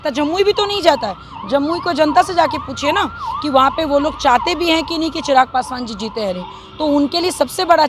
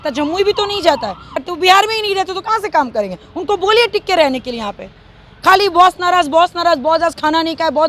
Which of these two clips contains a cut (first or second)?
second